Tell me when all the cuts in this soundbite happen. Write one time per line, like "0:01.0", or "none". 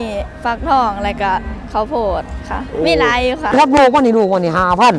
0:03.5